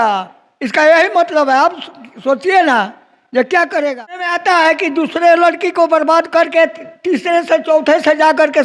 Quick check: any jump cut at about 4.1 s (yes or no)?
yes